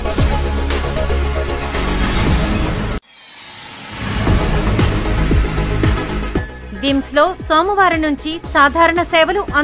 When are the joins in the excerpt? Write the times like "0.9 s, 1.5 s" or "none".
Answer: 2.8 s